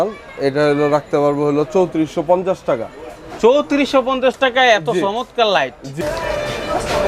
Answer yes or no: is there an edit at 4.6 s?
no